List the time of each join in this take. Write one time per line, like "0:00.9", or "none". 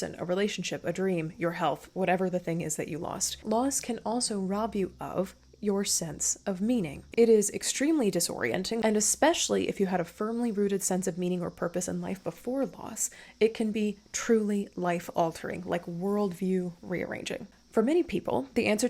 0:03.3
0:07.0
0:08.8
0:17.5